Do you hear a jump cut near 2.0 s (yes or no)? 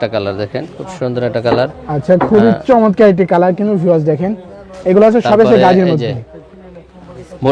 no